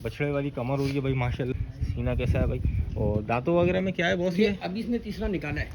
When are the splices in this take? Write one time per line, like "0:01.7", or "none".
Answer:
0:01.5

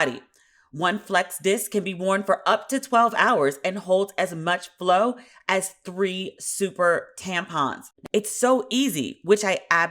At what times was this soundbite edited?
0:07.9

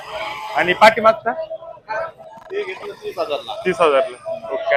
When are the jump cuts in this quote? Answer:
none

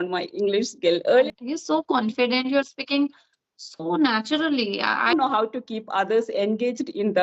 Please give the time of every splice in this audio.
0:01.3
0:05.1

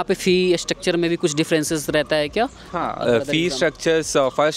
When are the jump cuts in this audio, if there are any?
none

